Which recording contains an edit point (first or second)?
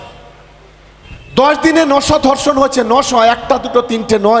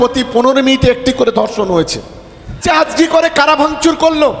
second